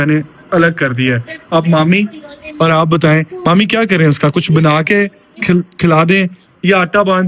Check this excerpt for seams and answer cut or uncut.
uncut